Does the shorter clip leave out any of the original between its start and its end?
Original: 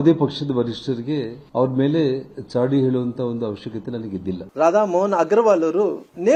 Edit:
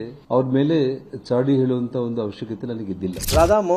no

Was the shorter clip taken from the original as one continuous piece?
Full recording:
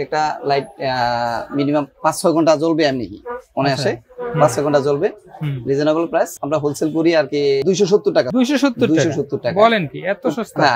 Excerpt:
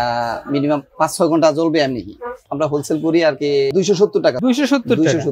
no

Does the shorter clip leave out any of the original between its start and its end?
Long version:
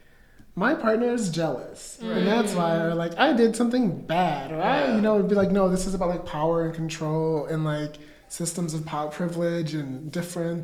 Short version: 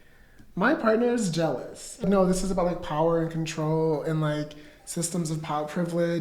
yes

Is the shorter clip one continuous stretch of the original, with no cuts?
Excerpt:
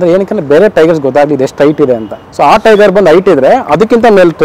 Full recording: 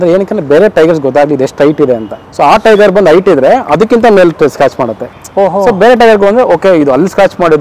yes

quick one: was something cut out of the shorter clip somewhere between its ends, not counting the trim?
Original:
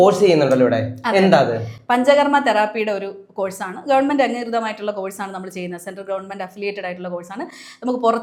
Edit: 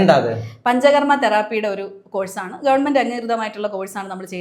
no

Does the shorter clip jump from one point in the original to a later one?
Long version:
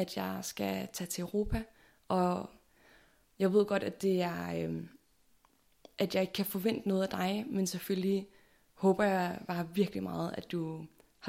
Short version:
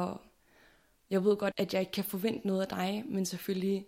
yes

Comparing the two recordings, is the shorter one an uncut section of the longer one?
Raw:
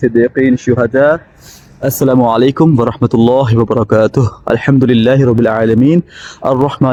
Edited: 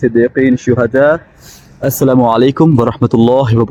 yes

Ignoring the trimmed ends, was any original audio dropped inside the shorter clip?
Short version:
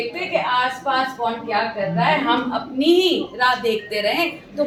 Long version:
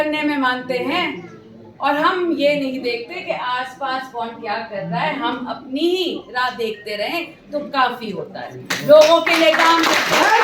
no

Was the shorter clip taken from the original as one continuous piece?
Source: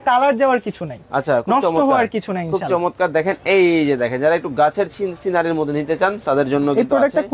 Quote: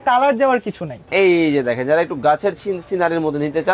no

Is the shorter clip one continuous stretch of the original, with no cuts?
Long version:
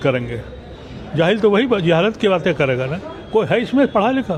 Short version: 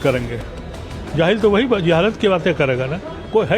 yes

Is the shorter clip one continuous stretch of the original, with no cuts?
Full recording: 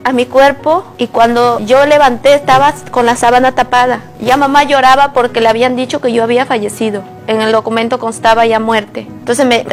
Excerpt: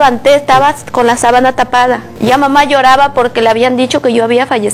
yes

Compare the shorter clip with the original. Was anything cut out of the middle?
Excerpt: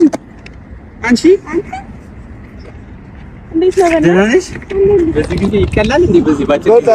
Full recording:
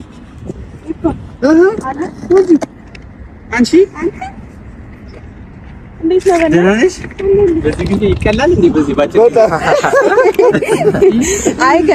no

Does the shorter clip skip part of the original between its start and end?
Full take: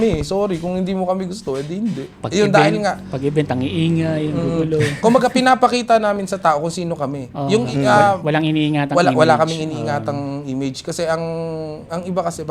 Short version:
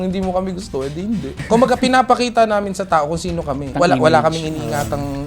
yes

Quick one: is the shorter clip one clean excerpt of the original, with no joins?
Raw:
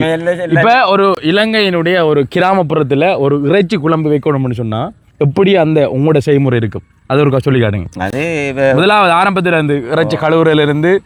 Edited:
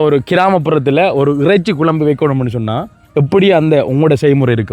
yes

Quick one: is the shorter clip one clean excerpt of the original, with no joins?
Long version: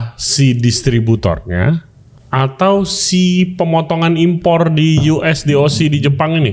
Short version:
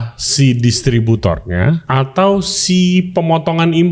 no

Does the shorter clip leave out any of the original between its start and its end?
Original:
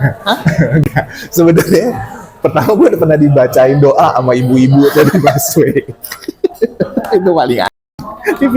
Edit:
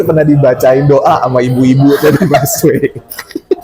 no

